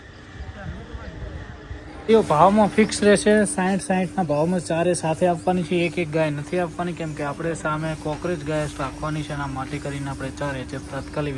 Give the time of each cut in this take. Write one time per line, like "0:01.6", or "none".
0:02.0